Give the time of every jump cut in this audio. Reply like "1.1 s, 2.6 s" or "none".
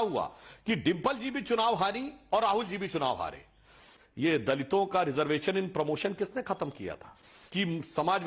3.7 s, 7.3 s